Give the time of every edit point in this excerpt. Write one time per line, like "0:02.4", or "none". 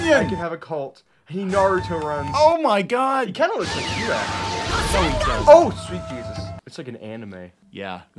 0:06.6